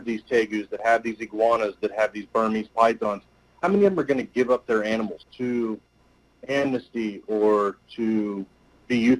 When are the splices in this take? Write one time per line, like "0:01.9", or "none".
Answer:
0:05.2